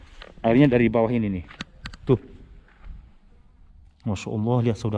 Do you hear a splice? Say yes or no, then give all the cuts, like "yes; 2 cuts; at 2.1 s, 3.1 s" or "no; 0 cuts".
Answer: no; 0 cuts